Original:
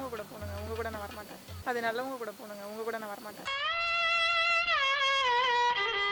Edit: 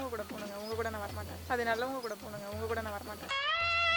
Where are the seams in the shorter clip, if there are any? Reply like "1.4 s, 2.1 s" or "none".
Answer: 1.3 s